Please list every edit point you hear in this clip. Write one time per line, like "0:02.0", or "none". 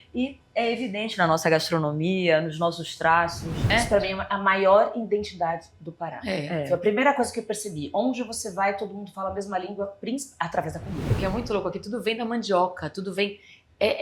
0:03.6
0:11.1